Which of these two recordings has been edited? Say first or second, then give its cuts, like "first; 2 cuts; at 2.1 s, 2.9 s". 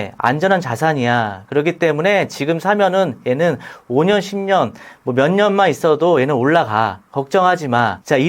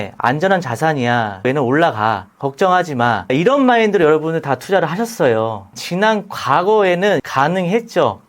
second; 4 cuts; at 1.5 s, 3.3 s, 5.7 s, 7.2 s